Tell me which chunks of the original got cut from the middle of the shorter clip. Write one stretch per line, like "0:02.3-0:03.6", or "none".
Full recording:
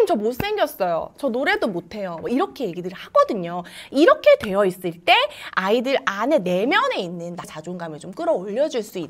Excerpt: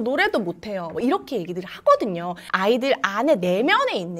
0:03.7-0:05.5